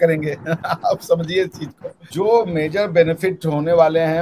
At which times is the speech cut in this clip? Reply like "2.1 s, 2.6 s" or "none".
1.9 s